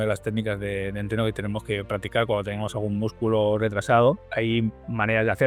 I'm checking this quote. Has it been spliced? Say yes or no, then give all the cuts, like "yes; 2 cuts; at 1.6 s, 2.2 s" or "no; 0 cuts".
yes; 1 cut; at 4.3 s